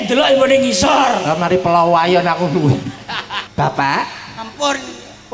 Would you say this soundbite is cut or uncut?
cut